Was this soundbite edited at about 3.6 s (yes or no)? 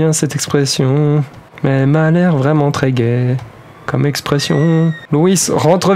no